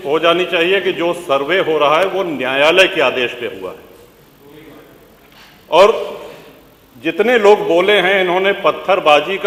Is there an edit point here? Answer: no; 0 cuts

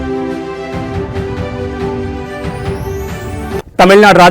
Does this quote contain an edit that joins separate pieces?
no; 0 cuts

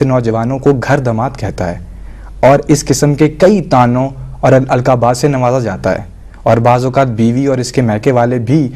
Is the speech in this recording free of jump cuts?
no; 1 cut; at 3.7 s

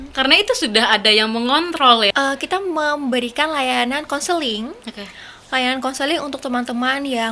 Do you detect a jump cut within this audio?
yes; 1 cut; at 2.1 s

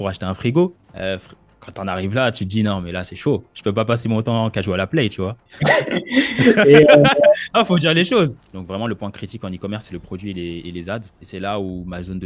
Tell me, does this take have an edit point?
yes; 2 cuts; at 5.4 s, 8.4 s

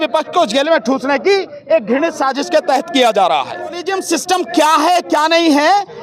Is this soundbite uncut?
no; 1 cut; at 3.9 s

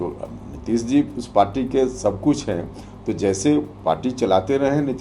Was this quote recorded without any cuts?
yes; 0 cuts

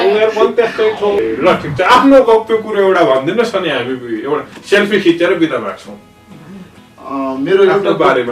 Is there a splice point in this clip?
yes; 1 cut; at 1.2 s

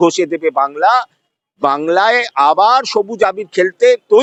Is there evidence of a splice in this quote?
no; 0 cuts

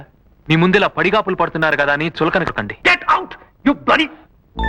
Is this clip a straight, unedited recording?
no; 1 cut; at 2.8 s

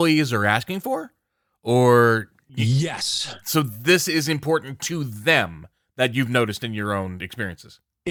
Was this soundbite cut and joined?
no; 0 cuts

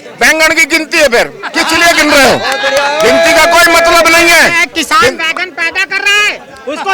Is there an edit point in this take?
no; 0 cuts

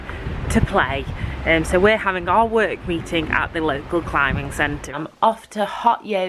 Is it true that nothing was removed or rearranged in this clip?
no; 1 cut; at 4.9 s

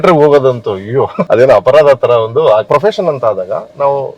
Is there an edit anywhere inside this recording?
yes; 2 cuts; at 1.2 s, 2.7 s

